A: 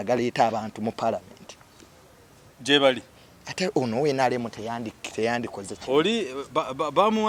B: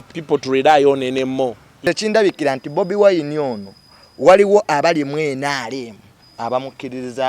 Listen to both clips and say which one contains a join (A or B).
B